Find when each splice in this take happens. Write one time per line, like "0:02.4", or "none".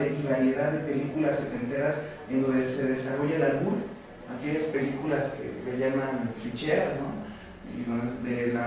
0:03.0